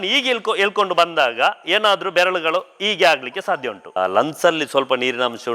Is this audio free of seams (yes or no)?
no